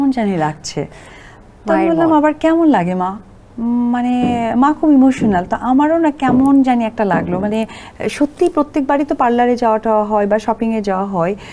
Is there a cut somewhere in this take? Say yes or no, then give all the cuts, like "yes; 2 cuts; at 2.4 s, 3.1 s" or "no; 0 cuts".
no; 0 cuts